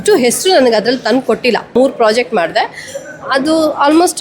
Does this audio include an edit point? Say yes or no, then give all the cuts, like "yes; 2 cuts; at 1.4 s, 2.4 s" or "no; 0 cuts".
yes; 1 cut; at 1.7 s